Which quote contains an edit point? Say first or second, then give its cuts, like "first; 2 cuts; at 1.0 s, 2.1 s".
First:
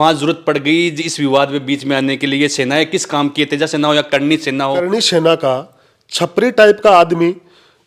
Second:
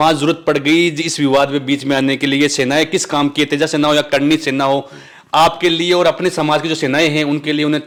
first; 1 cut; at 4.8 s